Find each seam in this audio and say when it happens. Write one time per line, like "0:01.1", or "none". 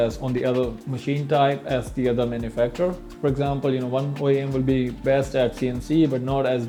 none